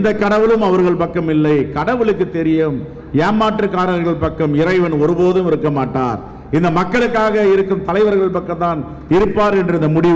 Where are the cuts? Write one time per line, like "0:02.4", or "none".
none